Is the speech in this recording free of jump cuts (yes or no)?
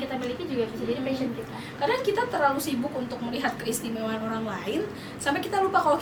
yes